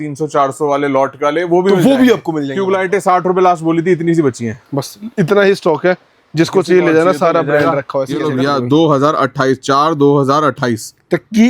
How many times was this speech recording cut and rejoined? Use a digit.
2